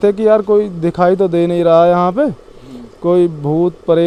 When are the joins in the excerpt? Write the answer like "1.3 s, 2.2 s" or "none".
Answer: none